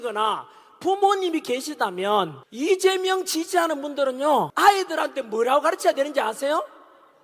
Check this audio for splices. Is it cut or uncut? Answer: cut